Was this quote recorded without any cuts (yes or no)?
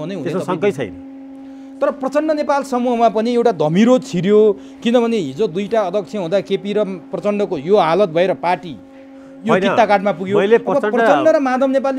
yes